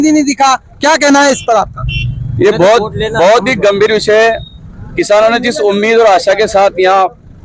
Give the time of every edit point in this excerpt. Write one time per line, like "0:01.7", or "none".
none